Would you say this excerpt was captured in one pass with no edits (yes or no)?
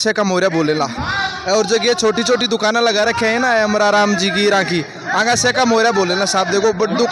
yes